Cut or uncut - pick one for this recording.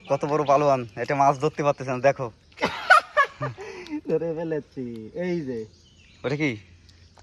uncut